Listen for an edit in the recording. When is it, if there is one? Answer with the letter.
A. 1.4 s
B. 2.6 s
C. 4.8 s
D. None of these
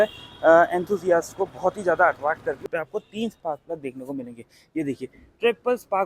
B